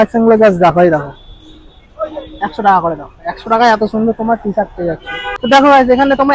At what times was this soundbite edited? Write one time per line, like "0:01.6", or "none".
0:05.4